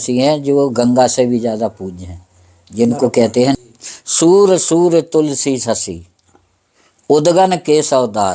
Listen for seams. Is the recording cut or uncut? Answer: cut